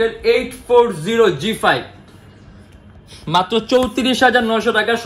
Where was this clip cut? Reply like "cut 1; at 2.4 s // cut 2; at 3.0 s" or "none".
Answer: none